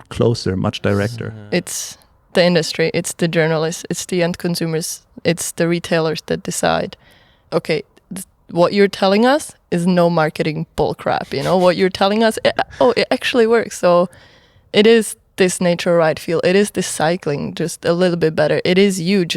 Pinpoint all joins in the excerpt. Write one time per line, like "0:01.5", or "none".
0:01.3